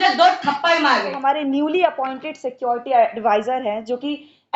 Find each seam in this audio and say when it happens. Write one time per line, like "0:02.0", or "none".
0:01.2